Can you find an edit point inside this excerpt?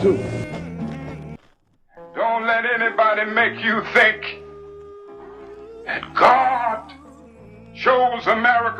yes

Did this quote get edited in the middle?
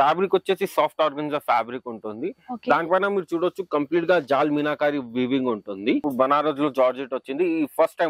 yes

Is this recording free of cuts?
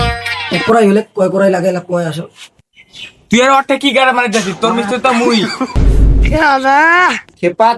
no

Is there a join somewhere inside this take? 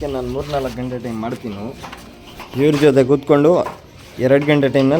no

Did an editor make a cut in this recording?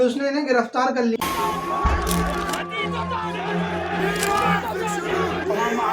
yes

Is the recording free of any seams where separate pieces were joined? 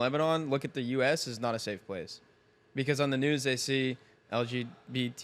yes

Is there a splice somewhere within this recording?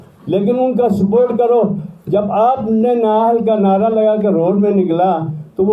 no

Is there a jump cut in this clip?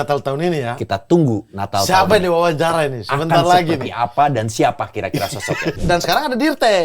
yes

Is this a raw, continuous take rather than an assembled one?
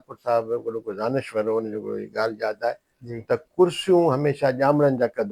yes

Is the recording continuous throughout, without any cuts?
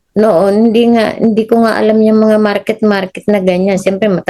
yes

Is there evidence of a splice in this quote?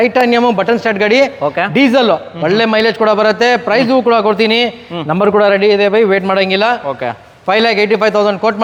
no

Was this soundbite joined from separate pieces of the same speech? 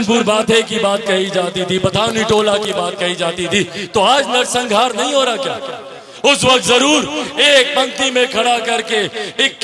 no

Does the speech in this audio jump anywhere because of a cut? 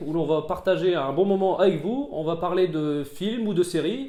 no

